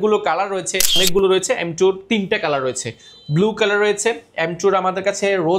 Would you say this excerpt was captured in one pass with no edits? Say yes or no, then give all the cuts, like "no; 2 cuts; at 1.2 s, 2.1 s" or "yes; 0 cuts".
no; 1 cut; at 1.0 s